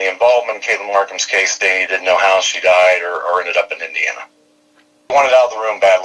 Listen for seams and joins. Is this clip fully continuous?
no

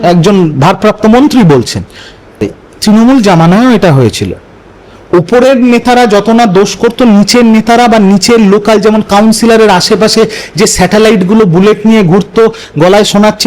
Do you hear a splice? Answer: yes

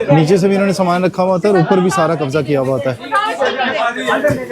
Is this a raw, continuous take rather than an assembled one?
yes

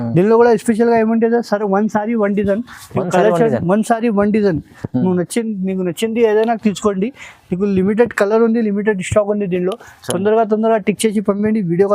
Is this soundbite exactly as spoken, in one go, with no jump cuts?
yes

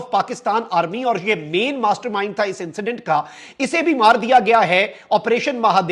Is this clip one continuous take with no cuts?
yes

